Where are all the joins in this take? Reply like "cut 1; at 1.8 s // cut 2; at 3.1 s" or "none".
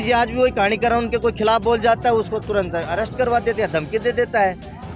none